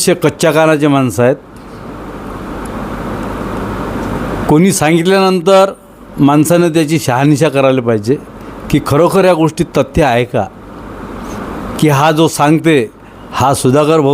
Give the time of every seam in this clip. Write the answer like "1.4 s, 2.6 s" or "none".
none